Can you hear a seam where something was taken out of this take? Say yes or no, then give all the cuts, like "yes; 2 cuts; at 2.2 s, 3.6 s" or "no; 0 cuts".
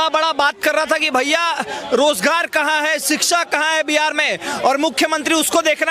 no; 0 cuts